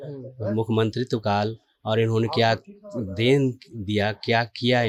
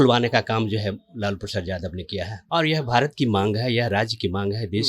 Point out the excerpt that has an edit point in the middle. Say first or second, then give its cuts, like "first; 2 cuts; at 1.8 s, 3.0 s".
second; 1 cut; at 2.4 s